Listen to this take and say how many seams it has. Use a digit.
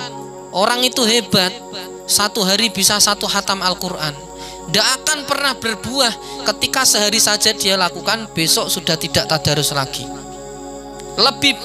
0